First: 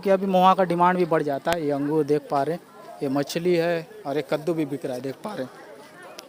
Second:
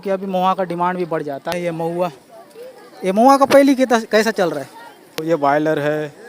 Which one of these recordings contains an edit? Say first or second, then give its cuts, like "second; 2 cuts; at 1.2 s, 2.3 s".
second; 2 cuts; at 1.5 s, 5.2 s